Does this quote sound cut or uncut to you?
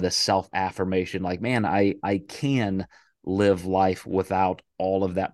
uncut